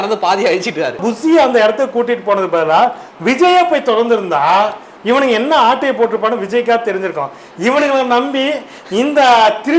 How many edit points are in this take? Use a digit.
1